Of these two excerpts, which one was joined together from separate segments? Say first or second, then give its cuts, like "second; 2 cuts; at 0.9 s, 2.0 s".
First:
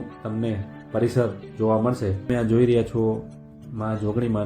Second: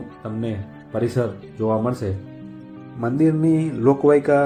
first; 1 cut; at 2.3 s